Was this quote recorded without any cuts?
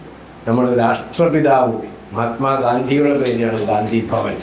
yes; 0 cuts

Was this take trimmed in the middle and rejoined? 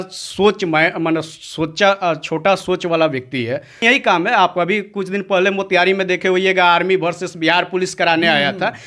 yes; 1 cut; at 3.8 s

